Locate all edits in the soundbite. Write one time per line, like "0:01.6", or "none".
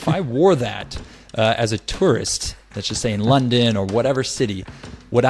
none